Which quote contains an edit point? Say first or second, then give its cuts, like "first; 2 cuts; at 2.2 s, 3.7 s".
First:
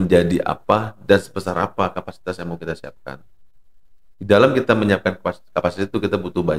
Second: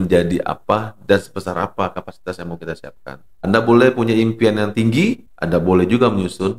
second; 2 cuts; at 3.3 s, 5.3 s